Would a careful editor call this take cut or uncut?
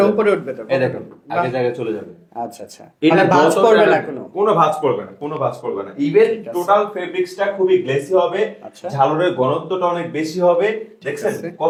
uncut